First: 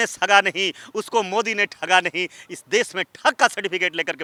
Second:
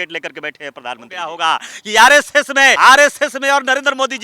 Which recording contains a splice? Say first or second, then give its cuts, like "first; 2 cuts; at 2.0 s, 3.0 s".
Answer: second; 2 cuts; at 1.3 s, 2.8 s